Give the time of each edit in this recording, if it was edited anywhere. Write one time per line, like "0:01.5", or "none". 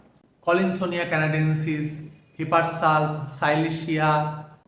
none

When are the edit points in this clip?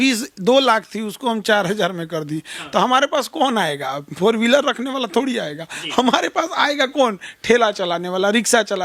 none

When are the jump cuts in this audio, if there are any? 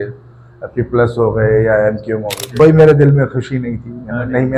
0:02.4

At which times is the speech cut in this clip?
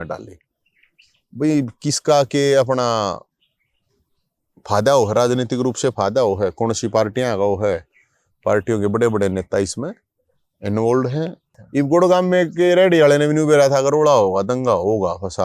0:11.4

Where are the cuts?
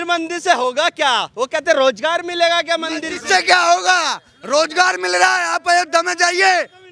none

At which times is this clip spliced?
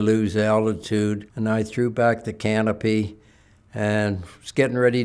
0:01.3

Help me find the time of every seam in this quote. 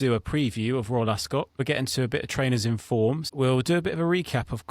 0:01.6
0:03.3

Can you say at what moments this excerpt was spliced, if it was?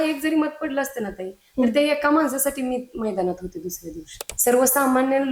0:04.2

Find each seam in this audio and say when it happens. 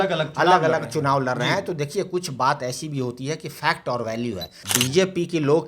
0:04.6

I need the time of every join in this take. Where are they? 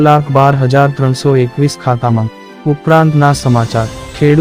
0:02.5

